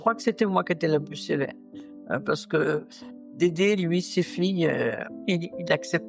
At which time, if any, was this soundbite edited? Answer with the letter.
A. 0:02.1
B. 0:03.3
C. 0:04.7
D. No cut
B